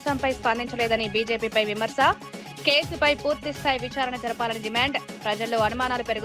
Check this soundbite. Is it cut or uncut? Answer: uncut